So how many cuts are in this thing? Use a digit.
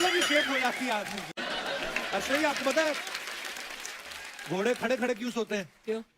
1